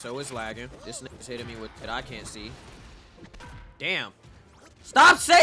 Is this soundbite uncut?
yes; 0 cuts

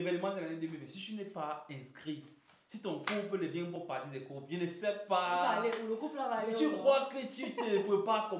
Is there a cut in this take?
no; 0 cuts

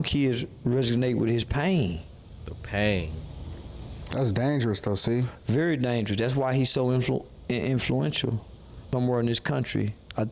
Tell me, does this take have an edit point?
yes; 1 cut; at 8.9 s

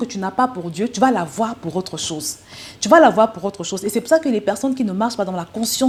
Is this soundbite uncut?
yes; 0 cuts

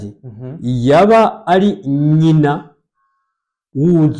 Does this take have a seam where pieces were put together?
no; 0 cuts

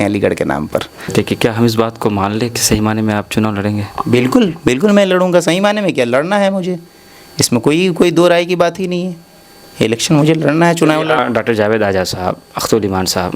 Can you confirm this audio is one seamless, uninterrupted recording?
no; 2 cuts; at 1.1 s, 11.2 s

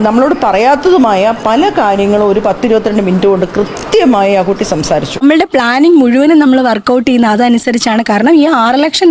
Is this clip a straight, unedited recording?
no; 1 cut; at 5.2 s

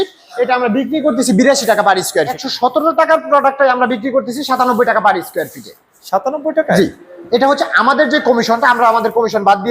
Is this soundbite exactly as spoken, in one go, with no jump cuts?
no; 1 cut; at 2.4 s

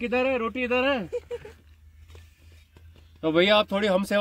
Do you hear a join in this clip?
no; 0 cuts

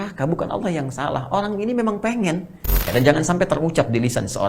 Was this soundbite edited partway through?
yes; 1 cut; at 2.9 s

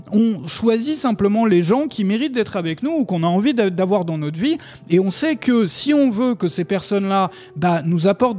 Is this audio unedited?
yes; 0 cuts

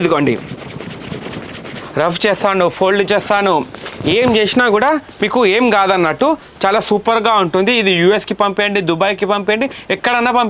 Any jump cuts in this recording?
no; 0 cuts

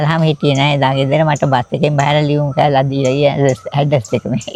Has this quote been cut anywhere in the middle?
no; 0 cuts

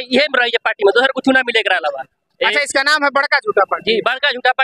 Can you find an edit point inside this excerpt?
no; 0 cuts

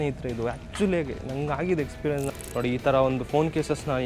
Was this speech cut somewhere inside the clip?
yes; 1 cut; at 2.3 s

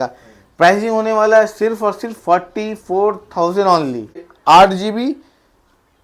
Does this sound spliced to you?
yes; 1 cut; at 4.3 s

